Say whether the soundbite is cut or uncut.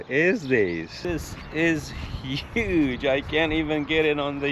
cut